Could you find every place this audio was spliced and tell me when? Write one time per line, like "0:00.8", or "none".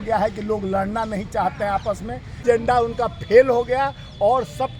0:02.4